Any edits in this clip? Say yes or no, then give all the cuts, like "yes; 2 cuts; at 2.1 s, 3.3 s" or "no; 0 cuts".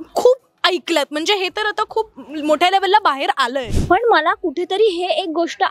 yes; 1 cut; at 3.7 s